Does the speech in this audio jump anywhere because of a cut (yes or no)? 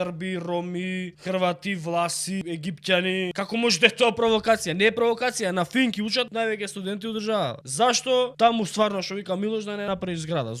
yes